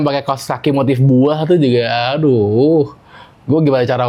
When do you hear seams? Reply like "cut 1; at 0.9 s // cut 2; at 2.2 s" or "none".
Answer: none